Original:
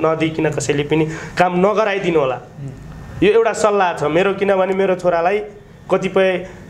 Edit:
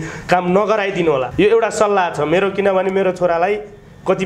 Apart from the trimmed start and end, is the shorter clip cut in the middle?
yes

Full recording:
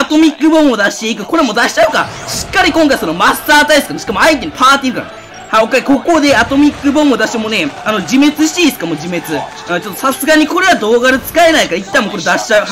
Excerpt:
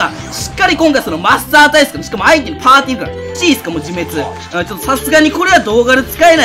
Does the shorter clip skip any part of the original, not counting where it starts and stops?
yes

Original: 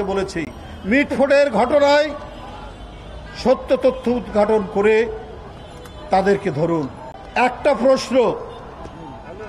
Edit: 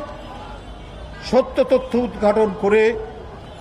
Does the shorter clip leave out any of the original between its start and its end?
no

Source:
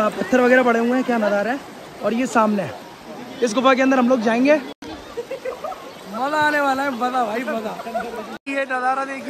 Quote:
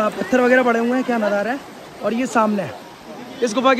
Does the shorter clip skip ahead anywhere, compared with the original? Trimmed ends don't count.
no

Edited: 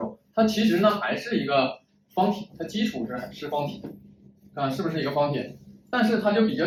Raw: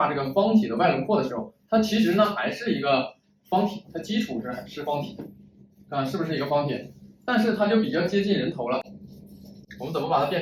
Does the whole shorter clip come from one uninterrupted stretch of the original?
yes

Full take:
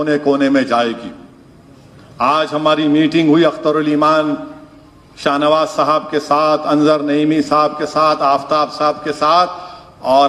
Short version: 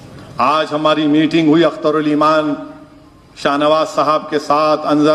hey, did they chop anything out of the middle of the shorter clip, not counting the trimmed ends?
no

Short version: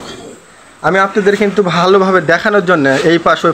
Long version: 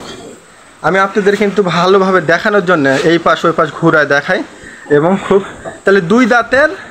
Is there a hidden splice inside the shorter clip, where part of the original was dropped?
no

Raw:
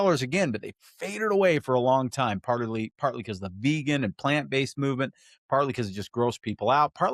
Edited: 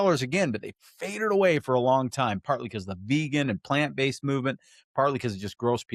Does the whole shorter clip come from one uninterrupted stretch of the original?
no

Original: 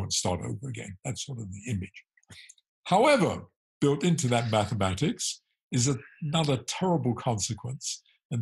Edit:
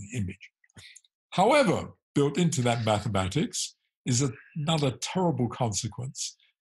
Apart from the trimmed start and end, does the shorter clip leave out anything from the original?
yes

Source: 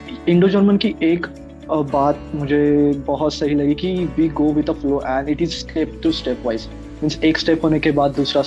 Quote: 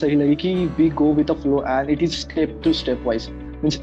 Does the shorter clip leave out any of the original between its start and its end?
no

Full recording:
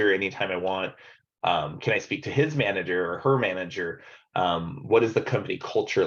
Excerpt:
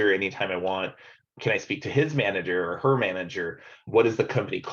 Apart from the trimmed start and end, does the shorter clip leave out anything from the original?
yes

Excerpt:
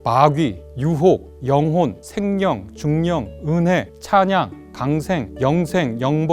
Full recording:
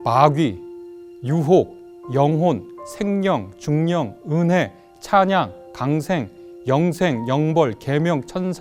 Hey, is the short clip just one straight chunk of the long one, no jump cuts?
no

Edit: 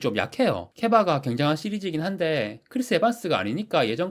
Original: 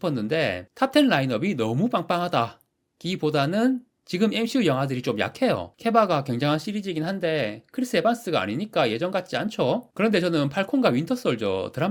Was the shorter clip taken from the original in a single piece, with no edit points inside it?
yes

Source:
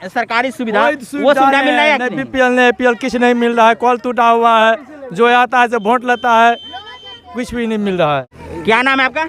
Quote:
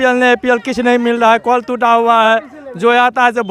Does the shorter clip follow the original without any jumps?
yes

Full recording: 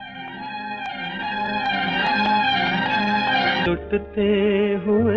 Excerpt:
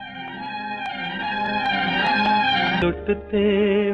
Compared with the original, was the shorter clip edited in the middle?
yes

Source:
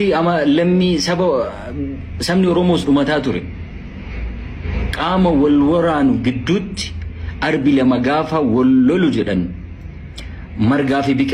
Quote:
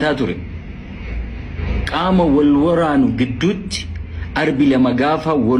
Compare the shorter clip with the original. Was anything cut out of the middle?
no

